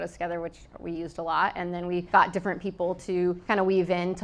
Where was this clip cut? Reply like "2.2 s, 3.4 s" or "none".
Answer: 2.1 s, 3.4 s